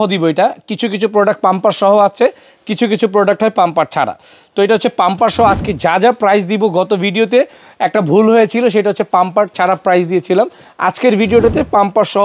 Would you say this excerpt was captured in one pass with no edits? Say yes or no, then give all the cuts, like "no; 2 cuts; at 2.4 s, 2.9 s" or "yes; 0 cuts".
yes; 0 cuts